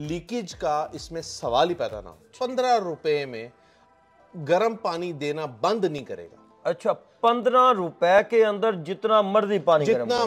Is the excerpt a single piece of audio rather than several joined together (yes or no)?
no